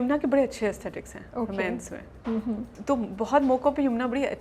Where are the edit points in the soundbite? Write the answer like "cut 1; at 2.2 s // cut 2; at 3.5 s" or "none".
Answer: none